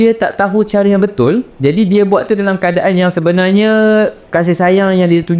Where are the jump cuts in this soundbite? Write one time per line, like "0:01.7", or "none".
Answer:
0:01.5
0:04.2